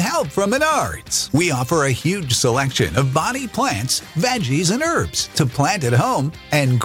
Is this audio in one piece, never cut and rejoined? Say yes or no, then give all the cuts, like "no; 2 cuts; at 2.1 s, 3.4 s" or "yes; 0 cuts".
yes; 0 cuts